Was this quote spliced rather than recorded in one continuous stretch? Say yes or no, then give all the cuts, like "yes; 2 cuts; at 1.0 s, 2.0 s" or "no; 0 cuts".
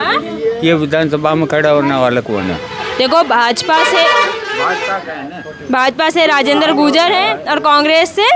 no; 0 cuts